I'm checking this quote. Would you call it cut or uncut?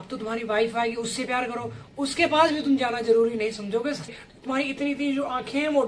cut